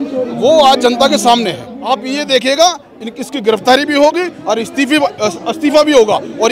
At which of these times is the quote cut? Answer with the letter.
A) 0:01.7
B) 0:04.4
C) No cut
A